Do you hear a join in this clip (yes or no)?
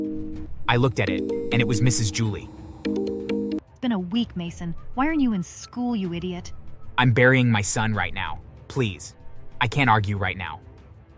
yes